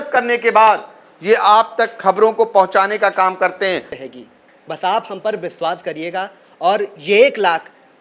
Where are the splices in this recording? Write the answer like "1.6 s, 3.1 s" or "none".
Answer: 3.9 s

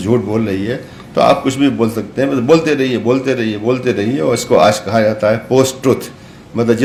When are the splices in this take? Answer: none

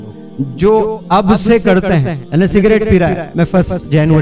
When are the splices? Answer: 2.2 s, 3.2 s

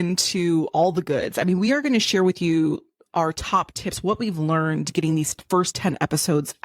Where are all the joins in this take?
none

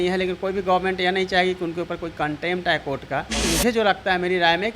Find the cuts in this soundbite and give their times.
3.5 s

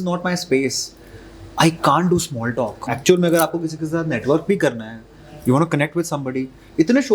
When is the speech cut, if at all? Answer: 2.9 s

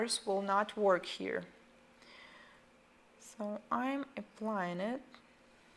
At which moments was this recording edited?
4.7 s

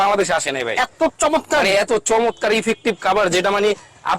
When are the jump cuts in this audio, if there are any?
none

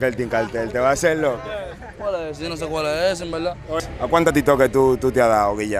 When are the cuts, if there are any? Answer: 3.8 s

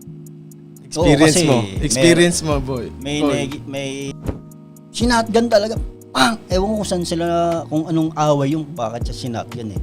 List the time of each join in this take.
0.9 s, 4.2 s

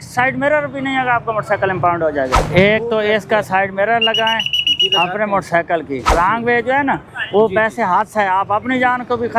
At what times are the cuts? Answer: 2.4 s, 6.1 s

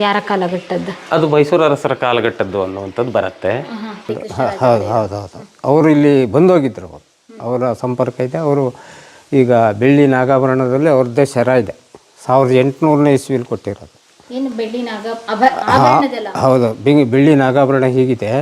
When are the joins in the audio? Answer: 4.0 s

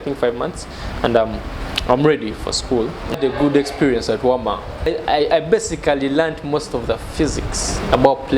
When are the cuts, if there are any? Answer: 3.2 s, 4.9 s

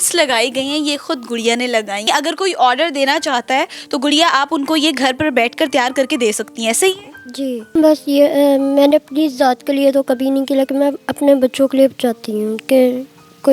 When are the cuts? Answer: 2.0 s, 7.6 s

